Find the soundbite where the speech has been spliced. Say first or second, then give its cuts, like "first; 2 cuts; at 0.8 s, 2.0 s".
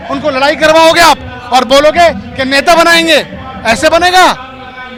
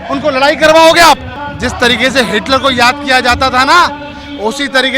second; 1 cut; at 1.3 s